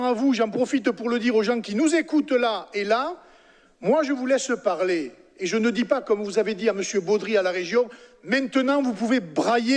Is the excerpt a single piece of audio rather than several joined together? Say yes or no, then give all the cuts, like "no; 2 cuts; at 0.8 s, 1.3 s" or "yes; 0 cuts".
yes; 0 cuts